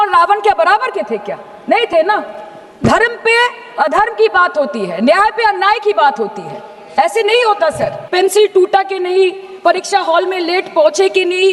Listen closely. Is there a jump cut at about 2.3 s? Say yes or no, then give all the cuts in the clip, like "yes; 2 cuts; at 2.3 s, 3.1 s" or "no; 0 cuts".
no; 1 cut; at 8.0 s